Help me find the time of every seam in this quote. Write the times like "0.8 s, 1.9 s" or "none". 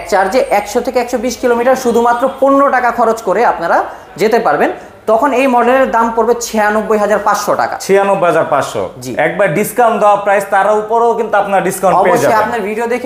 none